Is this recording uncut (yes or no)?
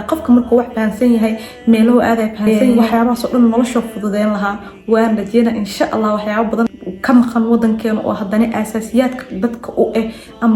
no